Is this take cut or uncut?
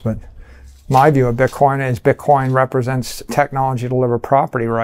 uncut